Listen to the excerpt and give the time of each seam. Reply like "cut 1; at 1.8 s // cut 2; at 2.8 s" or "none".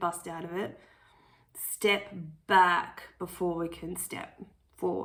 none